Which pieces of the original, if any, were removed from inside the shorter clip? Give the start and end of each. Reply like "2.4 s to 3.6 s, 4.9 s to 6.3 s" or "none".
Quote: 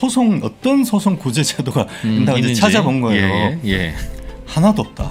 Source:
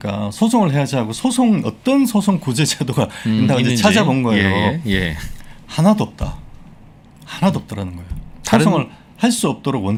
none